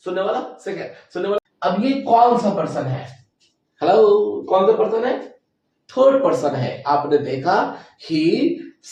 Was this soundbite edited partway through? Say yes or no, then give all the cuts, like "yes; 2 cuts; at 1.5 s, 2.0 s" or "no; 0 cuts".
yes; 1 cut; at 1.4 s